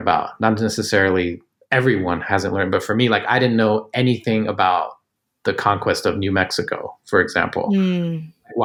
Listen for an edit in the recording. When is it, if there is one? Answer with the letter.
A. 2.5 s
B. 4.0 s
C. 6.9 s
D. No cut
D